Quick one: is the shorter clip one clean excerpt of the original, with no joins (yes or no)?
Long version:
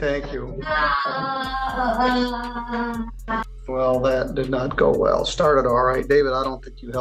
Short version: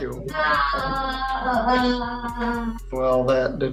no